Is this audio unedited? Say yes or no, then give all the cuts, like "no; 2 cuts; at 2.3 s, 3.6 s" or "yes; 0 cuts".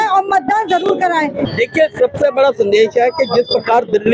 no; 1 cut; at 1.4 s